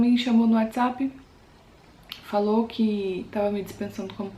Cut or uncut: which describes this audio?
uncut